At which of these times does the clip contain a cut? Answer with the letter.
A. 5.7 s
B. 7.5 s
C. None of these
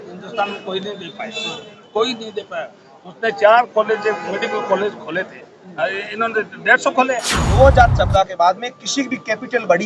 B